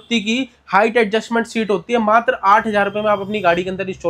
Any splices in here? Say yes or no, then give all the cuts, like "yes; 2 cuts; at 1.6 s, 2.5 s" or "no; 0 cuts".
no; 0 cuts